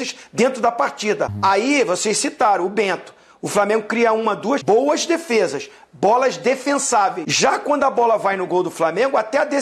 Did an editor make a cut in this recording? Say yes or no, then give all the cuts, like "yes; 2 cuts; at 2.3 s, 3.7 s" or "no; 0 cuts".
yes; 3 cuts; at 1.3 s, 4.6 s, 7.2 s